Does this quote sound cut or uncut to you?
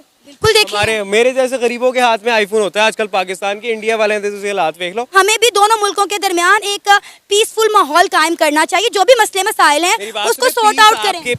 cut